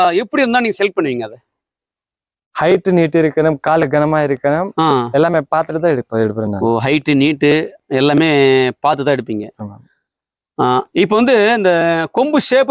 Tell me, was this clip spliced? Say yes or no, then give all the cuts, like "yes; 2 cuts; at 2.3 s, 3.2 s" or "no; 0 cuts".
no; 0 cuts